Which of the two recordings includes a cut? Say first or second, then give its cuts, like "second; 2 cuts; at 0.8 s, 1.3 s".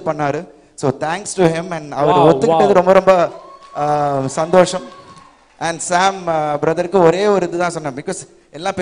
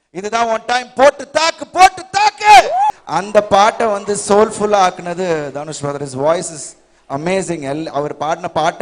second; 1 cut; at 2.9 s